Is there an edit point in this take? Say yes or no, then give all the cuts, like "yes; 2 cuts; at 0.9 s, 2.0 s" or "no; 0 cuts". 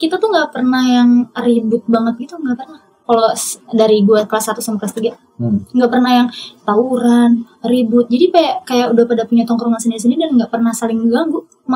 no; 0 cuts